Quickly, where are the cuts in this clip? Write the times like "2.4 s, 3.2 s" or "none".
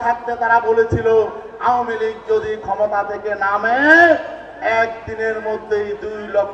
none